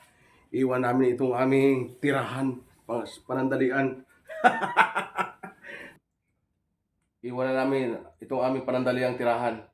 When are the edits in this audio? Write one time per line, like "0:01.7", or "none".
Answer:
0:06.1